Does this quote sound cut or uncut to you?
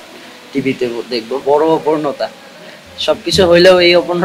cut